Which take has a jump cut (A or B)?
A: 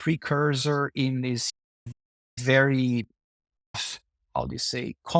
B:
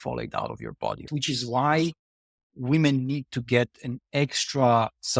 B